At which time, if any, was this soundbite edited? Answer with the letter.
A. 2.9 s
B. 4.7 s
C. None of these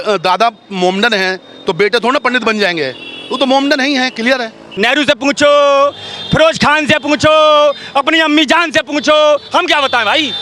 B